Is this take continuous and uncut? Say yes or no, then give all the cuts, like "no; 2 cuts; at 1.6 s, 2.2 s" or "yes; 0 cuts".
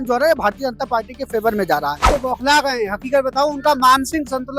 no; 1 cut; at 2.1 s